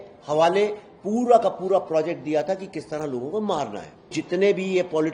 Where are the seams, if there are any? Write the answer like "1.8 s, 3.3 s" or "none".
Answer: 4.1 s

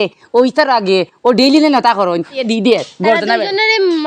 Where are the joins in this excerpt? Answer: 2.4 s

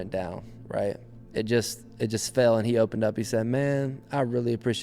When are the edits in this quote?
1.1 s

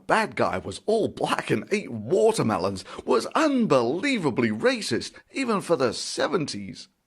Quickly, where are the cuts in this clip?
4.3 s

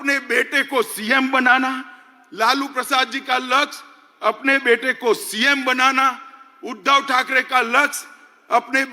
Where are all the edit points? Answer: none

